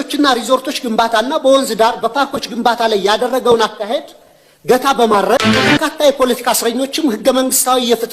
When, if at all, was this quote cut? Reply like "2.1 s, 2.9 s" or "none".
5.8 s